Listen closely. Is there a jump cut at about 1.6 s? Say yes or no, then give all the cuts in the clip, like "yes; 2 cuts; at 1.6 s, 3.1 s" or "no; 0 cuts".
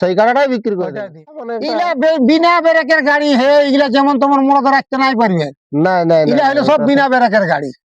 yes; 1 cut; at 1.6 s